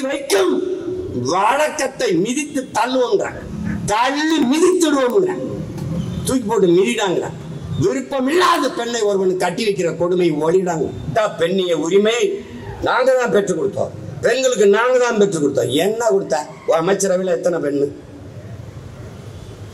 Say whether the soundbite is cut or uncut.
cut